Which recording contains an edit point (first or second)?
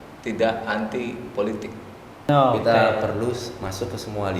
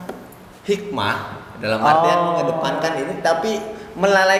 first